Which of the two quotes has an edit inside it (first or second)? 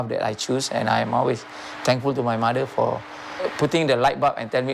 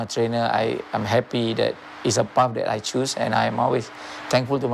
first